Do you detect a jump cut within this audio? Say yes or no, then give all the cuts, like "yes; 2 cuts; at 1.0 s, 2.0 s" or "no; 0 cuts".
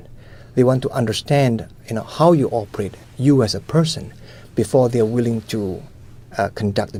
no; 0 cuts